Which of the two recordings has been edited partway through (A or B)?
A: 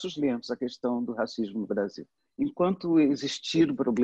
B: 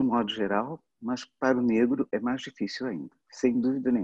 A